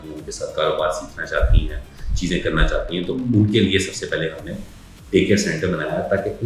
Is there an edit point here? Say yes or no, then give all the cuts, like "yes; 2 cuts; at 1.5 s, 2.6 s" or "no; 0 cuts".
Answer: no; 0 cuts